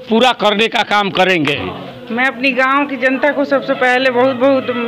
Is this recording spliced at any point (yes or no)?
yes